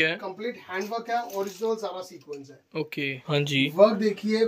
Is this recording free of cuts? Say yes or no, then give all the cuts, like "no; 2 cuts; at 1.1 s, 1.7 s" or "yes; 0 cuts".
no; 1 cut; at 3.2 s